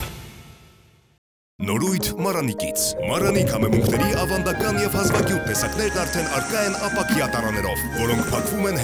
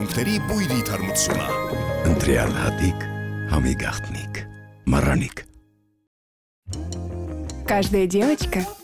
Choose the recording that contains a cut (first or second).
first